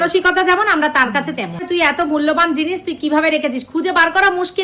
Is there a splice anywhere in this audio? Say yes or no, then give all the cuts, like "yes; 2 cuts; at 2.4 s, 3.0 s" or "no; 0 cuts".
yes; 1 cut; at 1.6 s